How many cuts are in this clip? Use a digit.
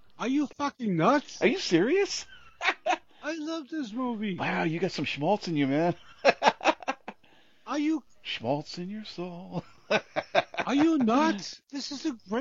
1